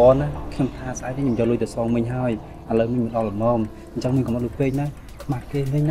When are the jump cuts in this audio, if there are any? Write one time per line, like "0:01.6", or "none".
none